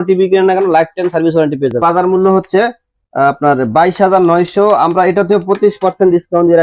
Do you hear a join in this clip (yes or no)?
yes